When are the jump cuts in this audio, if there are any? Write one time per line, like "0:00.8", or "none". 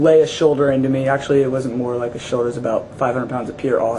none